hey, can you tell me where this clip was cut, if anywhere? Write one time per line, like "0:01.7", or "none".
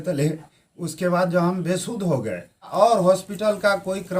0:02.7